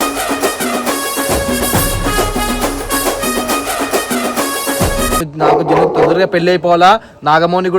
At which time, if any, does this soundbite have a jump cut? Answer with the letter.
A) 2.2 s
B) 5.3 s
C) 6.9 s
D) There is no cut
B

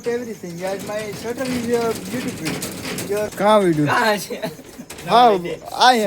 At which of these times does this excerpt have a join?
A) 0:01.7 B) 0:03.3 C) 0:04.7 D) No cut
B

